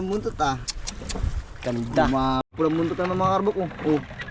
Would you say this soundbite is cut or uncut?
cut